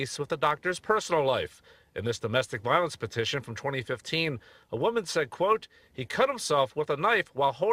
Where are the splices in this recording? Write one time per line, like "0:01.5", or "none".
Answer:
none